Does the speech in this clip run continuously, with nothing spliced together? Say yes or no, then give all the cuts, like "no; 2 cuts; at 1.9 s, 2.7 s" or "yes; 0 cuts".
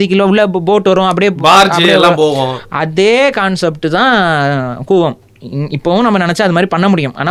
yes; 0 cuts